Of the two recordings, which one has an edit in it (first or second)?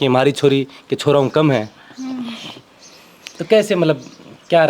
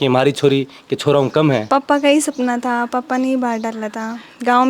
second